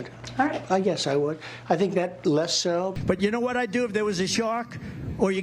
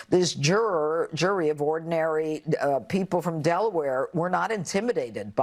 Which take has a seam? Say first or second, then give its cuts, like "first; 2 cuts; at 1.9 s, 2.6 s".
first; 1 cut; at 3.0 s